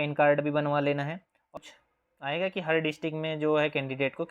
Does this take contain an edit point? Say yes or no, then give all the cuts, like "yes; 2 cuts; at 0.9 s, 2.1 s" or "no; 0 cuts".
yes; 1 cut; at 1.6 s